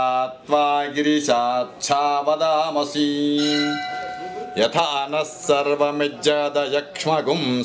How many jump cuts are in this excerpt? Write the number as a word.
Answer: one